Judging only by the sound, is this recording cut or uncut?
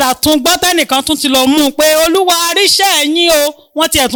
uncut